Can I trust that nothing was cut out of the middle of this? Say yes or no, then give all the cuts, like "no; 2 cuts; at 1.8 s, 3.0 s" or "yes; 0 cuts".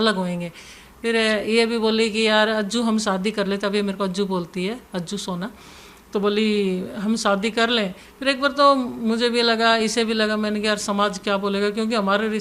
yes; 0 cuts